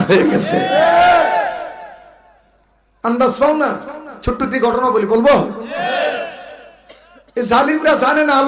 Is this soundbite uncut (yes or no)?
yes